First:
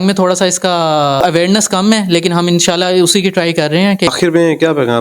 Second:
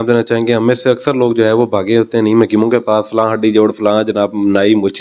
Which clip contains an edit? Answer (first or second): first